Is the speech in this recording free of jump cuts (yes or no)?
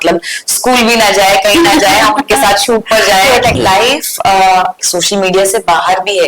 no